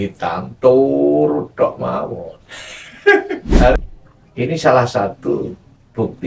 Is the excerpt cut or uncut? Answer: cut